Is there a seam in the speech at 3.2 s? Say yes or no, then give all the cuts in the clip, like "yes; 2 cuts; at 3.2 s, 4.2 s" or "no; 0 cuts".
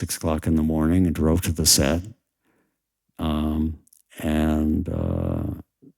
no; 0 cuts